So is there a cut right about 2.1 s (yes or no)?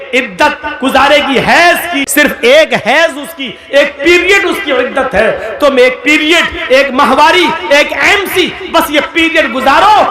yes